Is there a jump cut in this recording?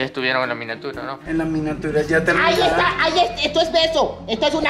yes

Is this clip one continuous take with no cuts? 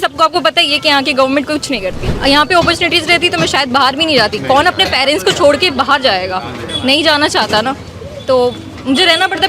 no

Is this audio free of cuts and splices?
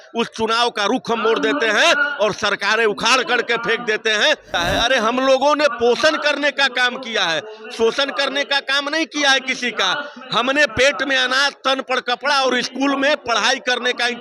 no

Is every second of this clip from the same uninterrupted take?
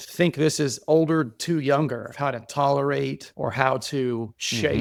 yes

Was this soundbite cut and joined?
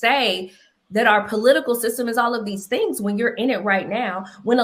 no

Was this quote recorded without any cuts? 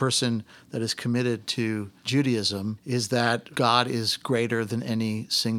no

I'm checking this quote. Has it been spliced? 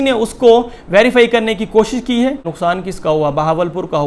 yes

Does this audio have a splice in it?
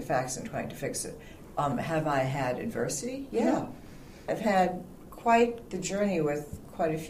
yes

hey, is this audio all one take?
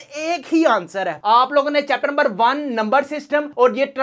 no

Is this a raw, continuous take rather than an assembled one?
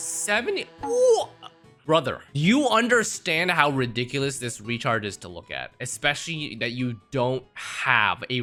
yes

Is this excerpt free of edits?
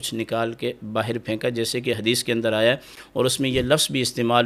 yes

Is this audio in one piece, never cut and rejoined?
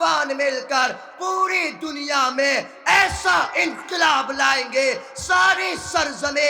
yes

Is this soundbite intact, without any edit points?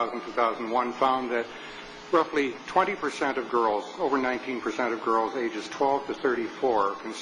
no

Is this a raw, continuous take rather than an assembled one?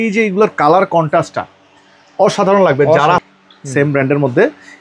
no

